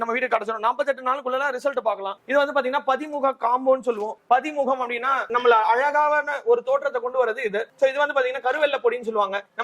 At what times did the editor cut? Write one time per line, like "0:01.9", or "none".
none